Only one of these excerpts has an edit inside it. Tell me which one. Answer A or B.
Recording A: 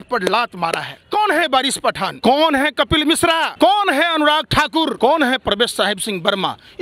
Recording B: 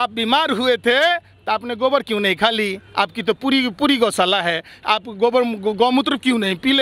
A